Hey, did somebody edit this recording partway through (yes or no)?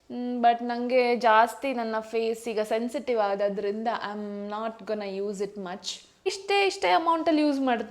yes